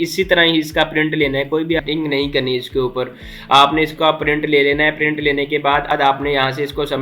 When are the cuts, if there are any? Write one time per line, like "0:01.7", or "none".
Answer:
0:01.8
0:05.9